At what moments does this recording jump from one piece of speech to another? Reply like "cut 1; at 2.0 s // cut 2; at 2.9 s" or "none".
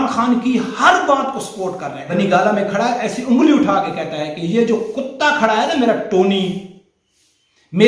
cut 1; at 1.9 s